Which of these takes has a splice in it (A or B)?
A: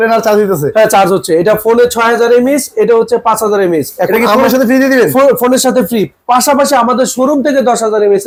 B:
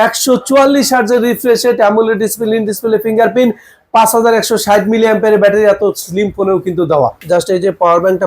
B